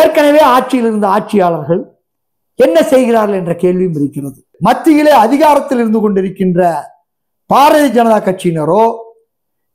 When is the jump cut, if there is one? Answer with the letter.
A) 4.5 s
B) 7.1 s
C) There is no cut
A